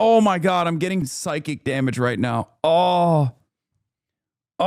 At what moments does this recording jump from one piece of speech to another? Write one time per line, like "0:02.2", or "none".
0:01.1